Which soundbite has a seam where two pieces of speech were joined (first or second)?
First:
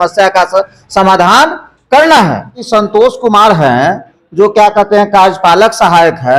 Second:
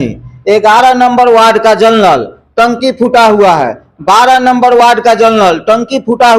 first